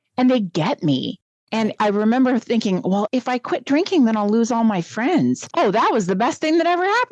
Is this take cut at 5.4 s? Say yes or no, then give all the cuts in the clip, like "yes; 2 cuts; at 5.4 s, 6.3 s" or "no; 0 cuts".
yes; 1 cut; at 5.4 s